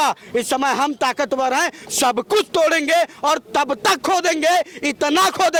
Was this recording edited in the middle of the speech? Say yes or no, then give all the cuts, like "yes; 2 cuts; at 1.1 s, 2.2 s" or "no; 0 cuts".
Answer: no; 0 cuts